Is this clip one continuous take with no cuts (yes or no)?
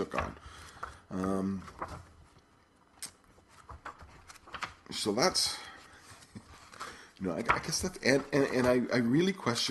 yes